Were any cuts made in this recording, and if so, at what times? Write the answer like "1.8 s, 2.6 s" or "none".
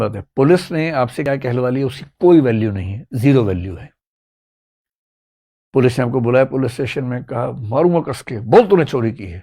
1.2 s